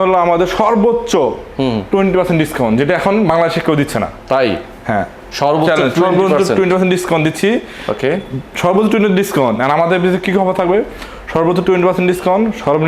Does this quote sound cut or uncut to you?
uncut